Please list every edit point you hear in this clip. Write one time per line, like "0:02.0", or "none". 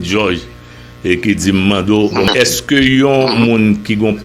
0:02.3